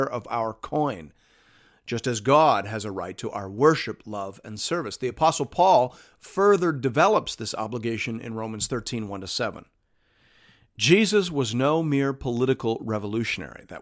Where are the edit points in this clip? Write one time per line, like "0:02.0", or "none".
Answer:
none